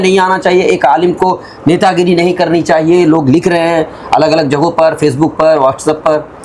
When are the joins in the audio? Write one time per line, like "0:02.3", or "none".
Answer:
none